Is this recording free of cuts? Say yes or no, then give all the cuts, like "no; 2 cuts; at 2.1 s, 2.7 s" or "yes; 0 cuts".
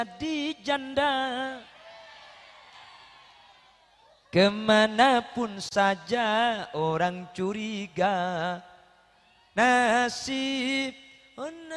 yes; 0 cuts